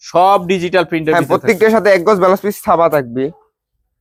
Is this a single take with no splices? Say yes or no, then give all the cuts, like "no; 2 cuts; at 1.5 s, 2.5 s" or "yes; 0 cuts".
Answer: yes; 0 cuts